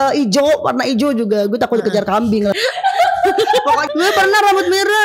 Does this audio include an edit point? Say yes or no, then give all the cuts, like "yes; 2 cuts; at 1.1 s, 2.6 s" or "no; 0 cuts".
yes; 2 cuts; at 2.5 s, 3.8 s